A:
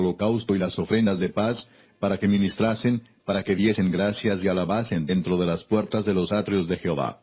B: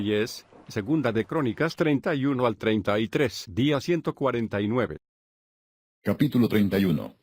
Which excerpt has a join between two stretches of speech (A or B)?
A